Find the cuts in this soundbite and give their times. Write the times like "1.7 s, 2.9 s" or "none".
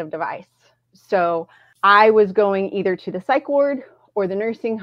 1.6 s